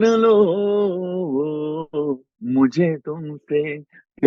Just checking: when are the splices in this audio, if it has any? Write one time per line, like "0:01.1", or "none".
0:02.3